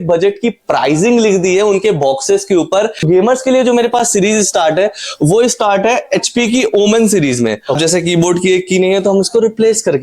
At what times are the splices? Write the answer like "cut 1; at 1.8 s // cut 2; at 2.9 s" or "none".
cut 1; at 3.0 s // cut 2; at 7.8 s